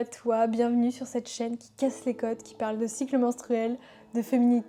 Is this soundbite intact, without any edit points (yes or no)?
yes